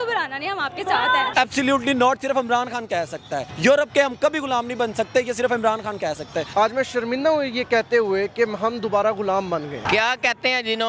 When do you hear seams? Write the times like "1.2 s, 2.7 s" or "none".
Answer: 1.3 s, 3.5 s, 6.4 s, 9.7 s